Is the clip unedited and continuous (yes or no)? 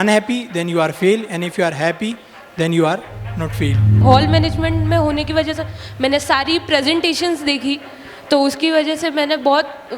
no